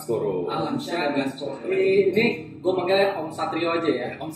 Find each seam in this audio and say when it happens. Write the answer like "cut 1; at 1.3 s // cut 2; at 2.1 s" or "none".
cut 1; at 1.7 s